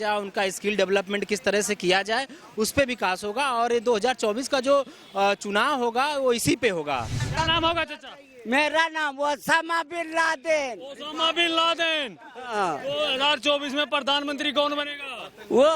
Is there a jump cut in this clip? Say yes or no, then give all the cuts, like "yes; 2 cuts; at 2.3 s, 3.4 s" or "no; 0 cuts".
yes; 1 cut; at 7.2 s